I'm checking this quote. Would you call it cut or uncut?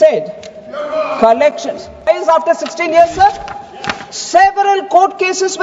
cut